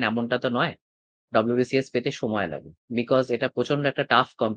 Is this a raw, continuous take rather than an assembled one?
yes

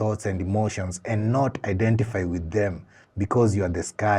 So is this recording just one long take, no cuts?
yes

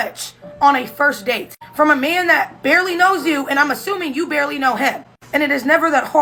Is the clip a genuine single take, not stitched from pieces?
yes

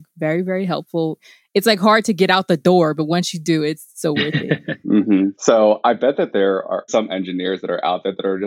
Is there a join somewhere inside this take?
yes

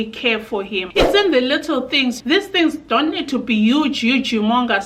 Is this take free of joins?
no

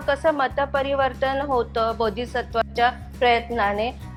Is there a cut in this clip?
no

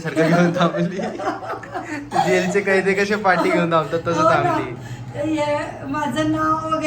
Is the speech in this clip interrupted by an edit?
no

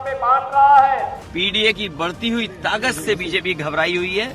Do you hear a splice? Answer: yes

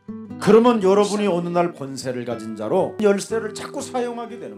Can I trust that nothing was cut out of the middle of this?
no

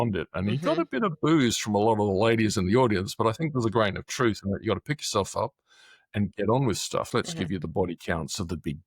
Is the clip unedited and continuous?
no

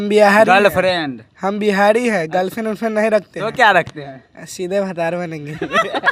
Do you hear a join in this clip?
no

